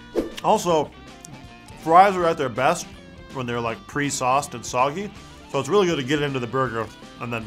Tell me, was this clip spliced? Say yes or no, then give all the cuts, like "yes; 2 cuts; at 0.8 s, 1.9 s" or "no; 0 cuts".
no; 0 cuts